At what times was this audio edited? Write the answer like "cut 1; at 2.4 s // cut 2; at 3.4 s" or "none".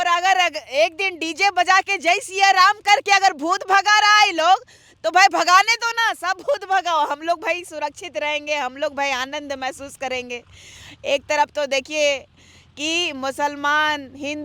none